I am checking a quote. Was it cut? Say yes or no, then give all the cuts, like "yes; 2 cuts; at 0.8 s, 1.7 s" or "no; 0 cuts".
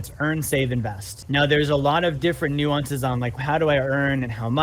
yes; 2 cuts; at 1.2 s, 3.4 s